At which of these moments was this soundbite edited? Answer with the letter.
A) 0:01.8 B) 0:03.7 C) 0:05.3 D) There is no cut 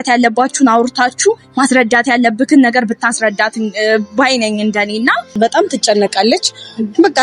C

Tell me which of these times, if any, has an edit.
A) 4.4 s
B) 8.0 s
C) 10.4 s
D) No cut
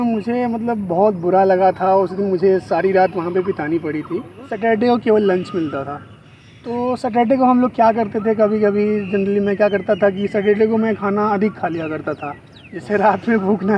A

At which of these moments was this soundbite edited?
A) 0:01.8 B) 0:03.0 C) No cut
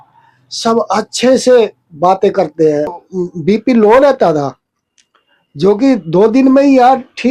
B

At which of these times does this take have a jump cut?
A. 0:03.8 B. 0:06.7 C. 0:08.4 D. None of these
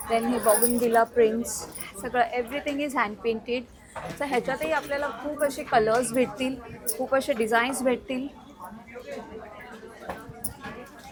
D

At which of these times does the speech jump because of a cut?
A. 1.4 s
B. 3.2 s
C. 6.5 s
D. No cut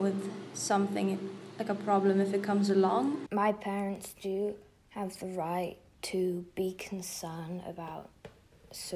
B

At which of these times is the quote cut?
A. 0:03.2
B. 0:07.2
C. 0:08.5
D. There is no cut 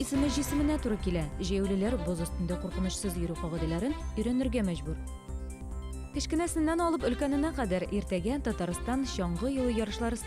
D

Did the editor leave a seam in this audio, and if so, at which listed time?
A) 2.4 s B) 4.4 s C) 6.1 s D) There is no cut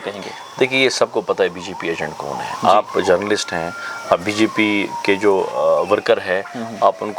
D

